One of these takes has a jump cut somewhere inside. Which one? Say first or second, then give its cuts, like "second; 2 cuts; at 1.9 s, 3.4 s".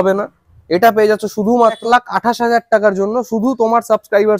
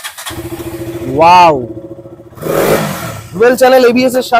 first; 1 cut; at 1.8 s